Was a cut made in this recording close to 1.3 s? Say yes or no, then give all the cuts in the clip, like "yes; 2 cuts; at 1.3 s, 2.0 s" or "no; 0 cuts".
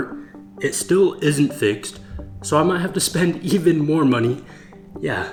no; 0 cuts